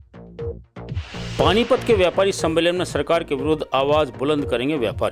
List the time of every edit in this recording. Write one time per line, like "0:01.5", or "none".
none